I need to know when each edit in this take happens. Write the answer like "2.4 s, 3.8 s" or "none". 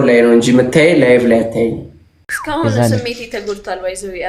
2.3 s